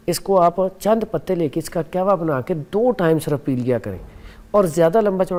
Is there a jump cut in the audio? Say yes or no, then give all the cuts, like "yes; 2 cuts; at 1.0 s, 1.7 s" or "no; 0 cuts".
no; 0 cuts